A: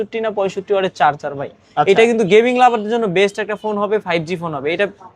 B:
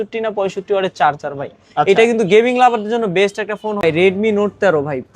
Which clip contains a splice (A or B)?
B